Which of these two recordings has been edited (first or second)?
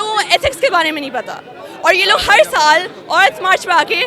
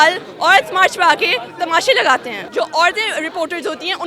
second